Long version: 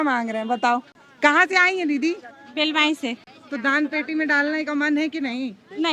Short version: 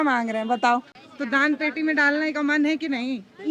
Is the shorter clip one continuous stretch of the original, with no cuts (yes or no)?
no